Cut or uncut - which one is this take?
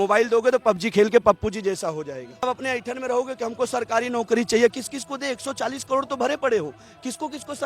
cut